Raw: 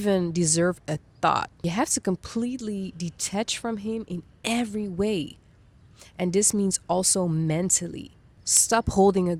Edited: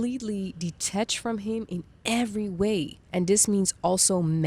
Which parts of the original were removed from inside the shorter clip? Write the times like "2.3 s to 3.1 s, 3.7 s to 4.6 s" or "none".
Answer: 5.4 s to 6.0 s